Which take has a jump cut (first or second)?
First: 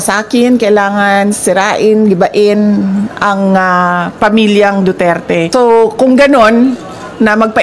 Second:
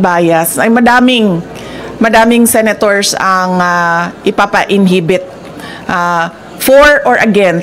first